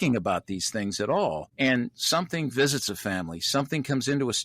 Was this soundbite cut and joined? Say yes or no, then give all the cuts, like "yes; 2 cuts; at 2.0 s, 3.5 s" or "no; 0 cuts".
yes; 1 cut; at 1.5 s